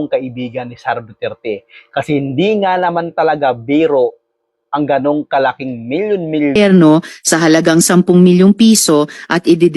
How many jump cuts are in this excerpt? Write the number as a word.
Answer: one